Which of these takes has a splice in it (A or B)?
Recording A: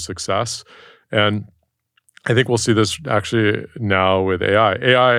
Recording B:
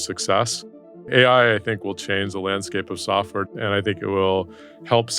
B